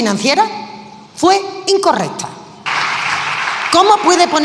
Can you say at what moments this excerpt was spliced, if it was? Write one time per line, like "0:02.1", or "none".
0:02.6